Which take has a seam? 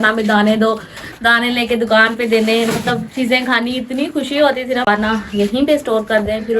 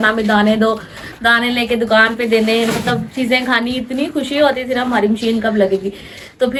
first; 1 cut; at 4.9 s

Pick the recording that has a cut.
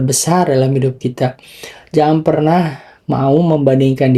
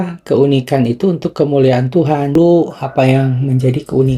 second; 1 cut; at 2.3 s

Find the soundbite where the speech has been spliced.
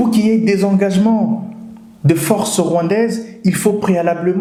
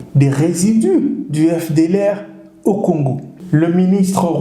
second; 1 cut; at 3.3 s

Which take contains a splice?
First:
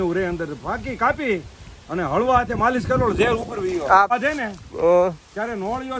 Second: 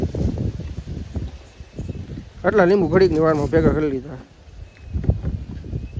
first; 1 cut; at 4.1 s

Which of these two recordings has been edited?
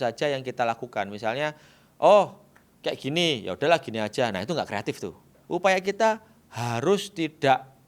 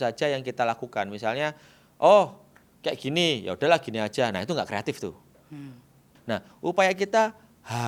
first; 1 cut; at 5.4 s

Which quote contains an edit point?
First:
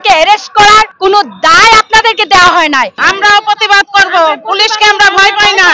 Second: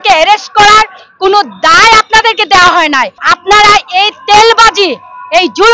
first; 2 cuts; at 0.9 s, 3.0 s

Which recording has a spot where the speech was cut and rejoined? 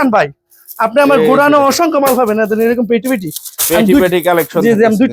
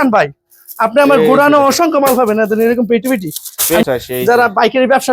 second; 1 cut; at 3.8 s

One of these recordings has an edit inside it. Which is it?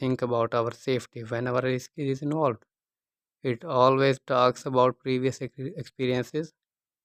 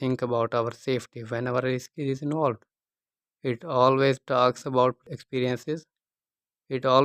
second; 1 cut; at 5.0 s

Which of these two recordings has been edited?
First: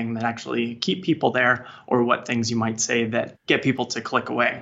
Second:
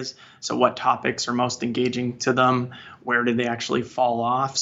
first; 1 cut; at 3.4 s

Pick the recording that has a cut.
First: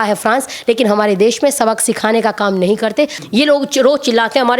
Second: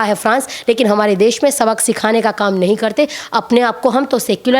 first; 1 cut; at 3.2 s

